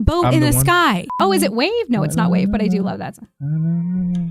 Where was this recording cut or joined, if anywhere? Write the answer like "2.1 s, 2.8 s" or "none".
1.1 s